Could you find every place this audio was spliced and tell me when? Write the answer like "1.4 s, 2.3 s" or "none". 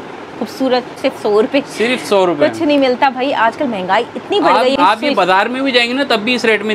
1.0 s, 4.7 s